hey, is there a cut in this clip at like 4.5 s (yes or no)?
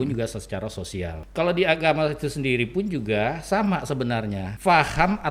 yes